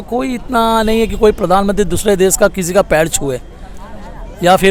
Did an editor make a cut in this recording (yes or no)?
no